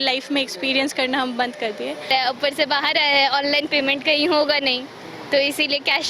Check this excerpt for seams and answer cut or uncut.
cut